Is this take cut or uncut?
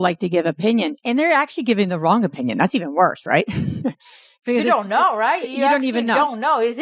uncut